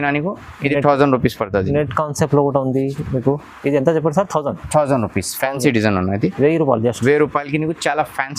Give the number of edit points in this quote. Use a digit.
0